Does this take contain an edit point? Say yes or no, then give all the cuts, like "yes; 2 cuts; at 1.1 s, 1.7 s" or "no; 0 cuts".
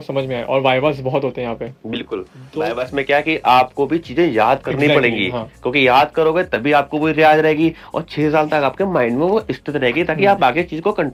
no; 0 cuts